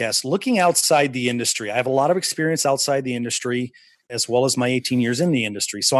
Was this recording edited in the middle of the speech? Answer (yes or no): yes